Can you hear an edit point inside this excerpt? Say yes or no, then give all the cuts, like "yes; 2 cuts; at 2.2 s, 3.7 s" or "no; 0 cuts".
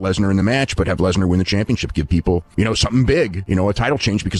no; 0 cuts